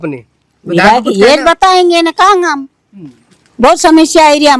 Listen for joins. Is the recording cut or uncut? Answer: uncut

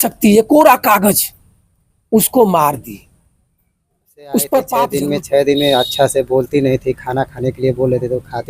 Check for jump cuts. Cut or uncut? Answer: cut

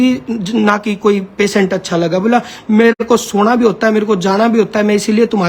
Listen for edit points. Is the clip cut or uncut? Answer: uncut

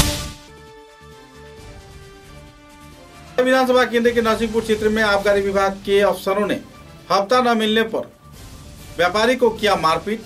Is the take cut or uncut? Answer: cut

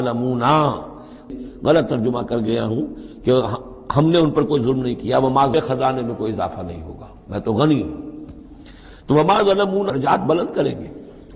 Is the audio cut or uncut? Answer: cut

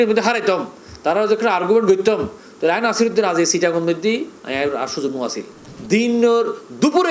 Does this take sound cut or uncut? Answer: cut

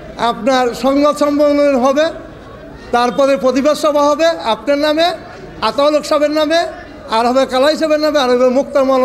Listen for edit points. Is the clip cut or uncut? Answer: uncut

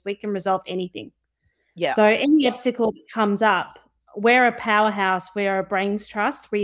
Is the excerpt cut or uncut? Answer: uncut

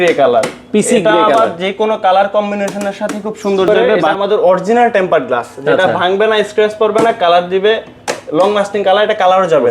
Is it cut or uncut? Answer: cut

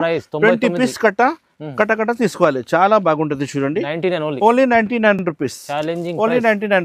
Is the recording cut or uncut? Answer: uncut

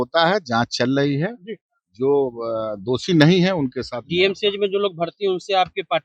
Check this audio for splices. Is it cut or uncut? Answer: uncut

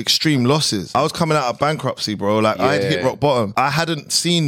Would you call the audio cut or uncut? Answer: cut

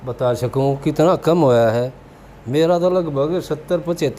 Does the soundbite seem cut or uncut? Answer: uncut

